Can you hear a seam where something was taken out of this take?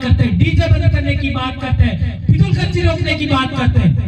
no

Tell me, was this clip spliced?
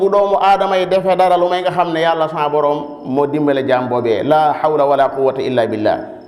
no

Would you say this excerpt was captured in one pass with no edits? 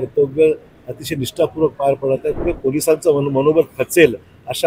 no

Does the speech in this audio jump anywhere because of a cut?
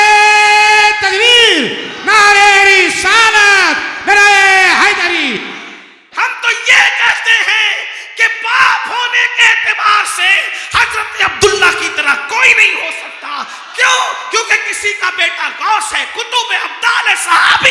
yes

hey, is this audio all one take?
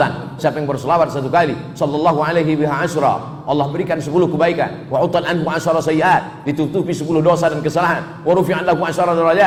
yes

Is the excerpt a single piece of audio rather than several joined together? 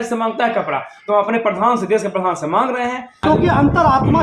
no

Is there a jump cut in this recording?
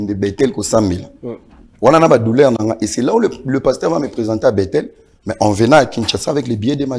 no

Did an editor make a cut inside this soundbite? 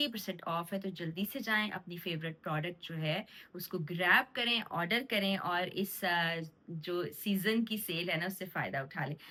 no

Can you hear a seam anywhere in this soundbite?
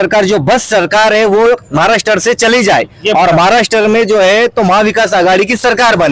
no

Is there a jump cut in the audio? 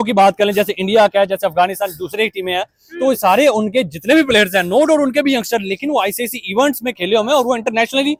no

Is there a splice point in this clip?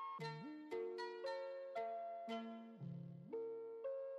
no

